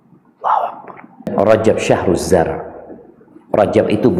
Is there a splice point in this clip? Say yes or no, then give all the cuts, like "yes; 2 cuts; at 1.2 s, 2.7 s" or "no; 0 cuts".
yes; 1 cut; at 1.3 s